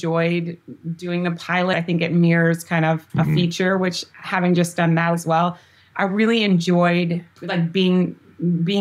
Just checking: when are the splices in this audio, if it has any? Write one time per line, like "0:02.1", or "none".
0:01.7
0:03.1
0:07.4